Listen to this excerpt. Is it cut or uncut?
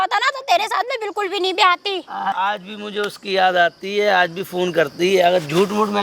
cut